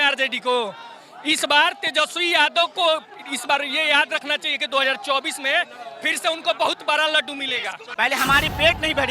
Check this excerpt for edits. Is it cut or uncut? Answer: cut